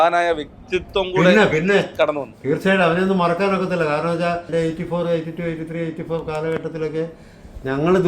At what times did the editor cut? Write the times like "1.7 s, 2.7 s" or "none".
4.5 s